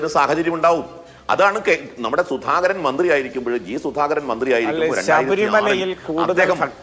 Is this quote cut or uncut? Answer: uncut